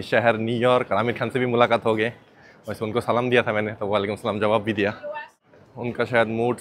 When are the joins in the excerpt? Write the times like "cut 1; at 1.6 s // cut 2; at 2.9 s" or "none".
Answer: none

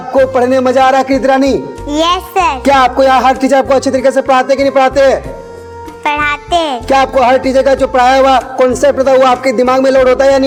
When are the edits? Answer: none

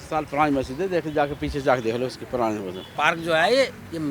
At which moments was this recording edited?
cut 1; at 2.8 s

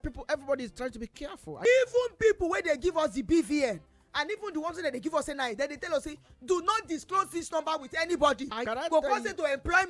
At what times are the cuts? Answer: cut 1; at 1.6 s // cut 2; at 8.6 s

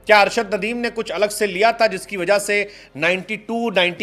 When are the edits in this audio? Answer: none

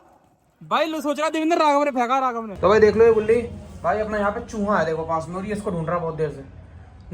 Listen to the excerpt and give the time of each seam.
cut 1; at 2.5 s

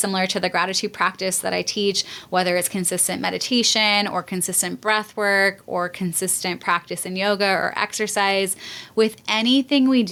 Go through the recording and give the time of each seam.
none

